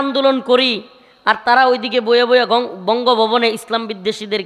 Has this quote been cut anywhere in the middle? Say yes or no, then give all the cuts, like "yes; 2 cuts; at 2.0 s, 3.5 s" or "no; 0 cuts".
no; 0 cuts